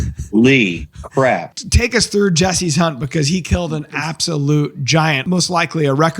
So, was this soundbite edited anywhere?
yes; 2 cuts; at 1.5 s, 5.2 s

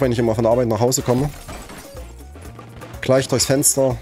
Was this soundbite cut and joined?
no; 0 cuts

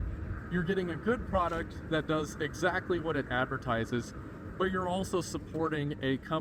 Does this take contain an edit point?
no; 0 cuts

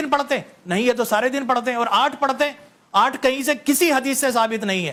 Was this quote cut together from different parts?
no; 0 cuts

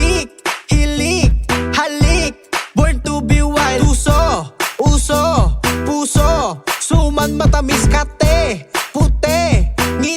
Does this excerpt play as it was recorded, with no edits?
no; 1 cut; at 5.2 s

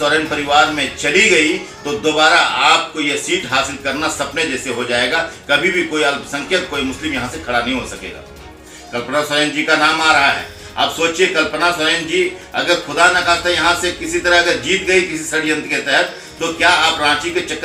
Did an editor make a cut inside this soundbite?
no; 0 cuts

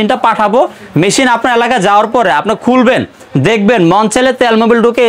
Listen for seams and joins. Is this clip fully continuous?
yes; 0 cuts

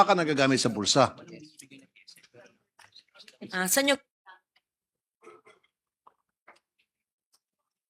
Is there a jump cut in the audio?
no; 0 cuts

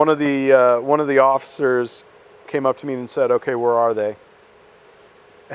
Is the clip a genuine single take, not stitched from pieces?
no; 1 cut; at 2.4 s

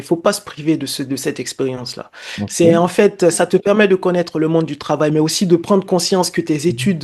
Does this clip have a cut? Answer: no; 0 cuts

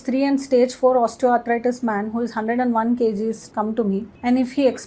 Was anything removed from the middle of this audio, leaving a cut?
yes; 1 cut; at 3.6 s

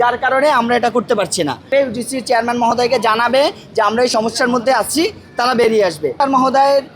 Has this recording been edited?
yes; 2 cuts; at 1.7 s, 6.2 s

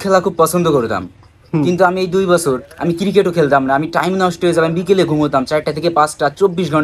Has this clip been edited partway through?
no; 0 cuts

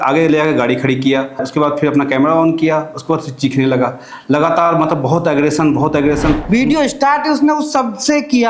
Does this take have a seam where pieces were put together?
yes; 2 cuts; at 1.4 s, 6.4 s

